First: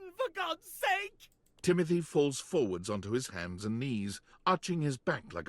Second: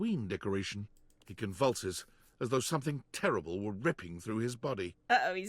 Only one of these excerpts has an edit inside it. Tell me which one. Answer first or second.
first